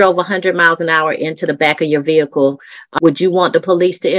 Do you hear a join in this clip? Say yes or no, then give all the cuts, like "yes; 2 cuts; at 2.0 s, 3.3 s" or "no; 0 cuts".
yes; 1 cut; at 2.8 s